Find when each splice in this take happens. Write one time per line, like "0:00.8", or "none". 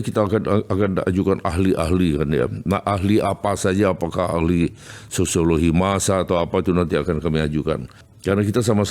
0:07.9